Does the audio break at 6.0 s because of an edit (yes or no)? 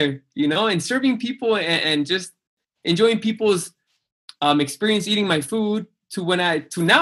no